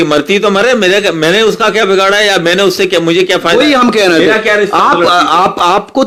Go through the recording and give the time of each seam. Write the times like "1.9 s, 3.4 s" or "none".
none